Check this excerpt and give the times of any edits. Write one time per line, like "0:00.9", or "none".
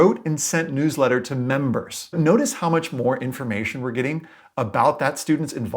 0:02.1